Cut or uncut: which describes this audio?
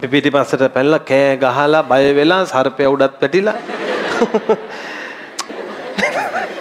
cut